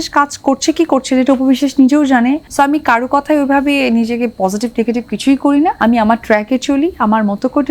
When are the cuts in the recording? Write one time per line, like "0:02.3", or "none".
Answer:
0:02.4
0:05.8